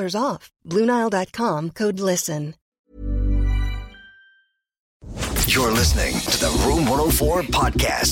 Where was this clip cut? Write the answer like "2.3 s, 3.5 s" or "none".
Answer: 2.7 s, 5.2 s